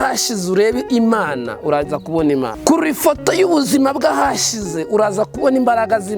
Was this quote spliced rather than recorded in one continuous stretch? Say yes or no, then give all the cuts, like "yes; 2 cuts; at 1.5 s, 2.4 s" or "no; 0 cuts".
yes; 1 cut; at 2.6 s